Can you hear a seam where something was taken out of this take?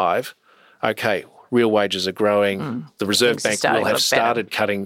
no; 0 cuts

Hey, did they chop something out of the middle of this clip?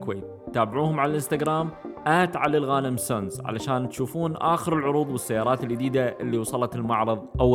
no; 0 cuts

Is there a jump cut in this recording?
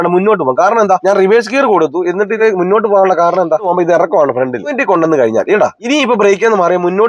yes; 5 cuts; at 1.0 s, 2.4 s, 3.7 s, 4.8 s, 5.8 s

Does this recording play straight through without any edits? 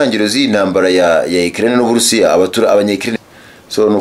no; 1 cut; at 3.1 s

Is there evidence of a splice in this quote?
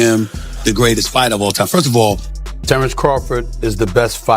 yes; 1 cut; at 2.3 s

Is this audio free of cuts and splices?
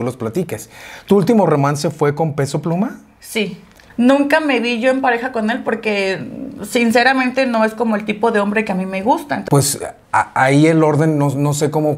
no; 2 cuts; at 3.6 s, 9.4 s

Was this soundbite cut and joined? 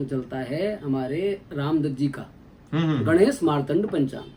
no; 0 cuts

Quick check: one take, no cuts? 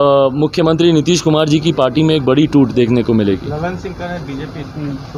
yes; 0 cuts

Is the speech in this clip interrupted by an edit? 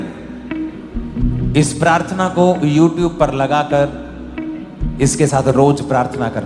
yes; 1 cut; at 1.1 s

